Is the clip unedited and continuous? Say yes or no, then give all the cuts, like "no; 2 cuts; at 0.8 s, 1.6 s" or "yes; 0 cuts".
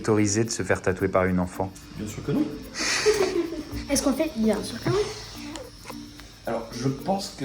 yes; 0 cuts